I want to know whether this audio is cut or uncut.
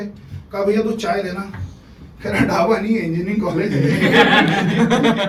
uncut